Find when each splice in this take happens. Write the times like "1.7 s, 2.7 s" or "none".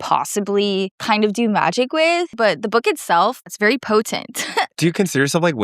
1.0 s, 2.3 s, 3.5 s, 4.7 s